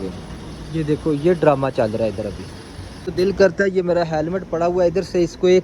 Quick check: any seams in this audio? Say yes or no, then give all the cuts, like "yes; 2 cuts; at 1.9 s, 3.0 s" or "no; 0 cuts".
yes; 1 cut; at 3.1 s